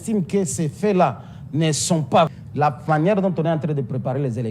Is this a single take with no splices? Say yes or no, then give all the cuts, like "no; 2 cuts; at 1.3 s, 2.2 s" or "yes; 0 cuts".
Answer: no; 1 cut; at 2.3 s